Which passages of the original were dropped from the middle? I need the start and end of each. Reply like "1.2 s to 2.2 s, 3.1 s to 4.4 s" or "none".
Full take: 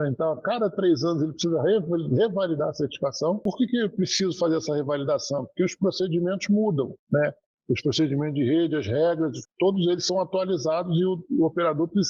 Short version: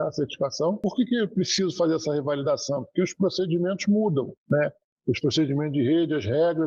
none